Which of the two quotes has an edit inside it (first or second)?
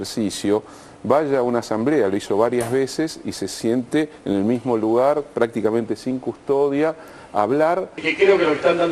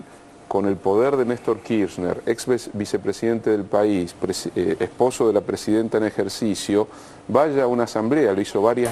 first